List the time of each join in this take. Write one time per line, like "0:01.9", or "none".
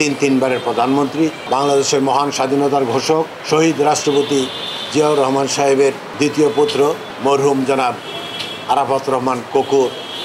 0:01.4
0:03.4
0:06.1
0:07.1